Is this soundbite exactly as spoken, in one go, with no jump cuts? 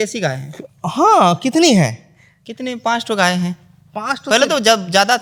yes; 0 cuts

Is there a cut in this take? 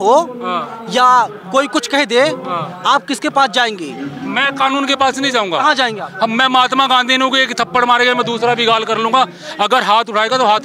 no; 0 cuts

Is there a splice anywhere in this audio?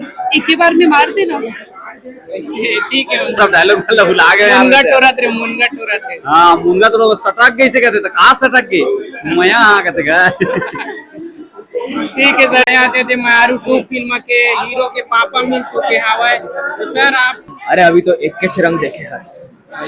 yes; 3 cuts; at 3.4 s, 12.6 s, 17.5 s

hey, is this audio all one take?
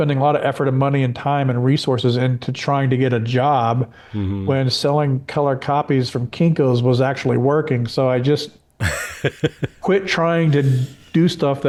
yes; 0 cuts

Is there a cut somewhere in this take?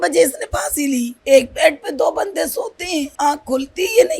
yes; 2 cuts; at 1.1 s, 3.1 s

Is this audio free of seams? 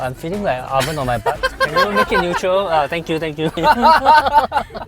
no; 1 cut; at 3.6 s

